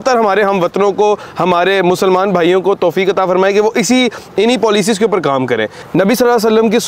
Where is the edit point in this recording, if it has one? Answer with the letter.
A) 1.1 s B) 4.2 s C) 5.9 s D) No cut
D